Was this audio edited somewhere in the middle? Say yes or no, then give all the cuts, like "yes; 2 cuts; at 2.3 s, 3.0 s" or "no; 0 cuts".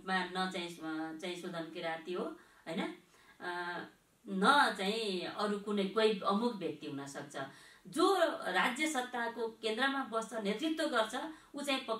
no; 0 cuts